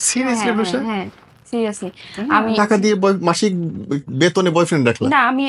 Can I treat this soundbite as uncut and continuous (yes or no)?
no